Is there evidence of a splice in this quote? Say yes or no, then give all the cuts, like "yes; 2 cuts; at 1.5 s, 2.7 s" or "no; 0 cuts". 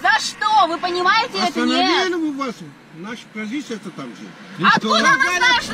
no; 0 cuts